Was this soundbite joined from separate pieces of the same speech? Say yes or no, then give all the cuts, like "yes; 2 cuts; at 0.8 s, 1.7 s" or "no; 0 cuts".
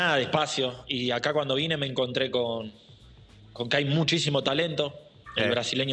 no; 0 cuts